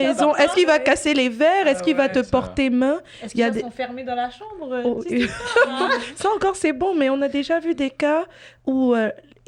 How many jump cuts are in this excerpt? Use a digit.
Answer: 0